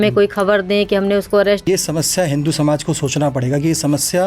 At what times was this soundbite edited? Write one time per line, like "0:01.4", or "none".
0:01.7

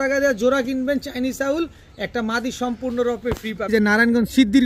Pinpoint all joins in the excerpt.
0:03.7

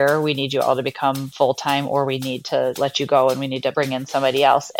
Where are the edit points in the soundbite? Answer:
0:01.3
0:02.8
0:03.7

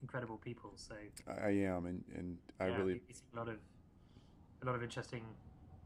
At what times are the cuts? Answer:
0:04.4

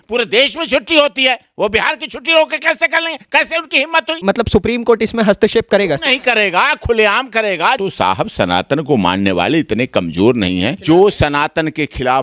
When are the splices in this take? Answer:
0:04.2
0:07.8
0:10.8

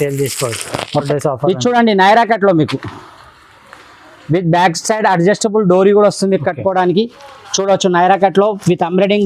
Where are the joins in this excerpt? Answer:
0:01.1

